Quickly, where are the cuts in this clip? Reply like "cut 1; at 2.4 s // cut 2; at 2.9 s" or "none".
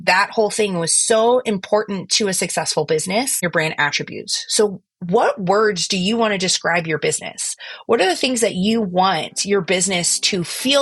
cut 1; at 3.4 s